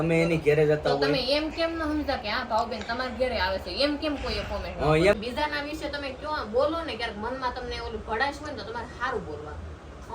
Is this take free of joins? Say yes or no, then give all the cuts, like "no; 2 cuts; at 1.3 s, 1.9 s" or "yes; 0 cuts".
no; 1 cut; at 5.1 s